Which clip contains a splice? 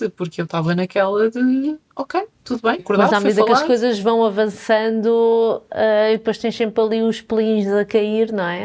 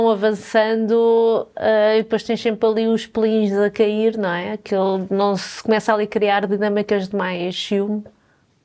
first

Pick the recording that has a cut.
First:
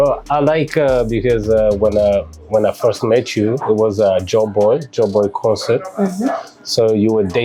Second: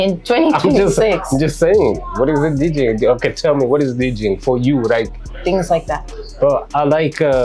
second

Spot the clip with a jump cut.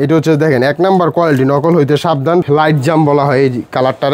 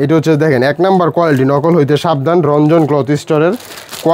first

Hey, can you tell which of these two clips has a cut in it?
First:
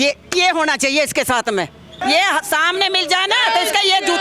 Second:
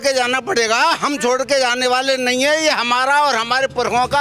first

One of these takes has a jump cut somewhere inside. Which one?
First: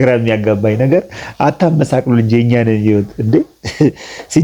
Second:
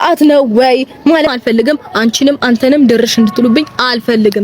second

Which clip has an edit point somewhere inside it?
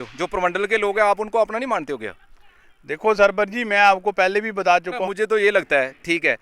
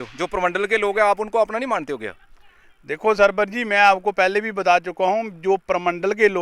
first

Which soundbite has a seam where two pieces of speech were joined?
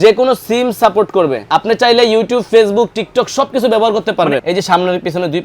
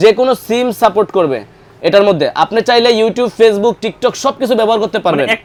first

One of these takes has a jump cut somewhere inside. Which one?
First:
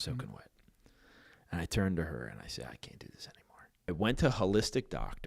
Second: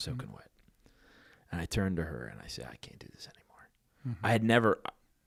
first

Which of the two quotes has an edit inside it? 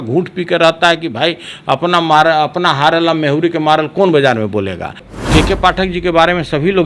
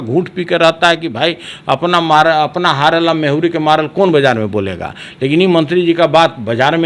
first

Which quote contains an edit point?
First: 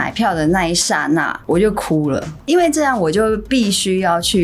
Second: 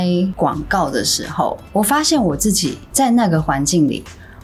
first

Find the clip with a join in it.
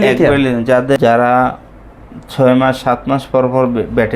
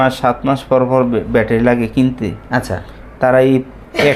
first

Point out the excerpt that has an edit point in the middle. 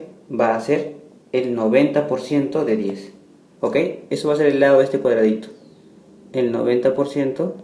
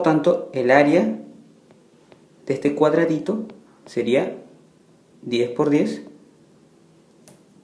second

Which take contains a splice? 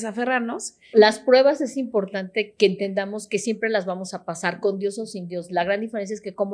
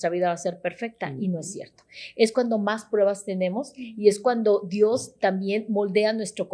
first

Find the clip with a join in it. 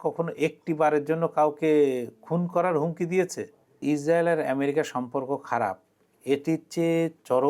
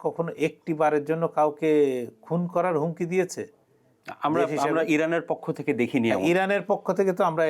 first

